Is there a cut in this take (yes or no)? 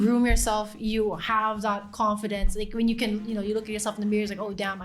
no